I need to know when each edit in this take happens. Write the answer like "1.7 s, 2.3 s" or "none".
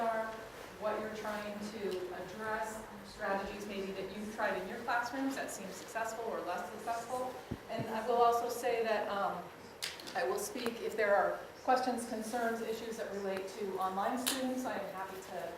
12.2 s